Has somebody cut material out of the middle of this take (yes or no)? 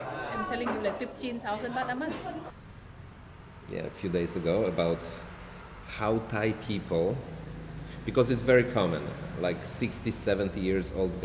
yes